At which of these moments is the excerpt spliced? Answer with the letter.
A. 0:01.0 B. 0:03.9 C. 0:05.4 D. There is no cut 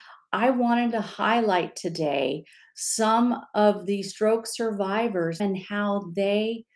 C